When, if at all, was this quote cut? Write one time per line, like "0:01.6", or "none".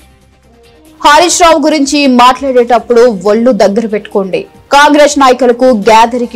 0:00.9